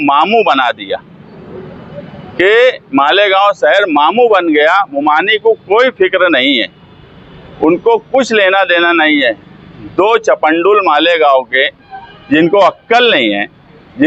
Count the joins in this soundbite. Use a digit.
0